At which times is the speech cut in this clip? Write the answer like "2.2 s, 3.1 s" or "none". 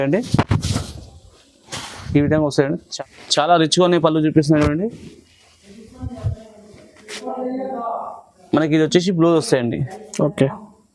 2.9 s